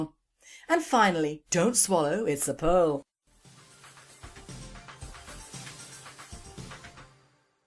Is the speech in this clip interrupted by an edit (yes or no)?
no